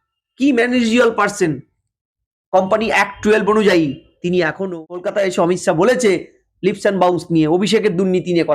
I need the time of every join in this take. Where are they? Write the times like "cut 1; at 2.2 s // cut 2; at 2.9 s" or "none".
cut 1; at 4.6 s